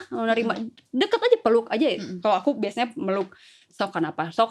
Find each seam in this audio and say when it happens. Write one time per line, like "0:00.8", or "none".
none